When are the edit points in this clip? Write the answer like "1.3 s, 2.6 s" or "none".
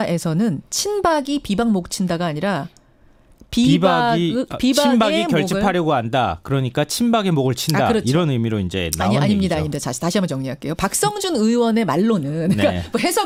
none